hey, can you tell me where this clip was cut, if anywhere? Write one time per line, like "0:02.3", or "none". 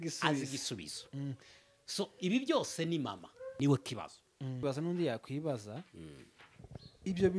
0:03.5
0:04.6